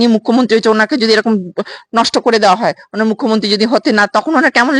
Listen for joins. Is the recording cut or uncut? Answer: uncut